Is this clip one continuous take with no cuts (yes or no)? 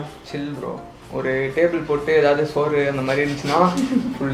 yes